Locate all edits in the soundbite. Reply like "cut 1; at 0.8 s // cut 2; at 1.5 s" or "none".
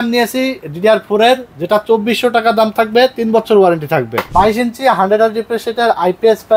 cut 1; at 4.3 s